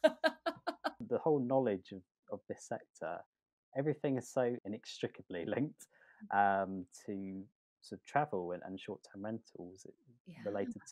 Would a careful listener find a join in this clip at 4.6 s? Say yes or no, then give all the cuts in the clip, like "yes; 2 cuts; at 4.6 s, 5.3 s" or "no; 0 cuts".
yes; 2 cuts; at 1.0 s, 4.6 s